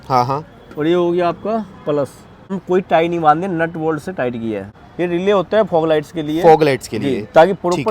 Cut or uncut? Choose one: cut